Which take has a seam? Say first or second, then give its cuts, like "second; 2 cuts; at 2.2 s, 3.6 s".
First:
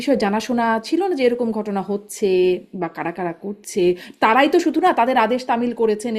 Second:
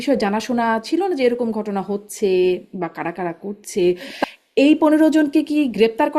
second; 1 cut; at 4.1 s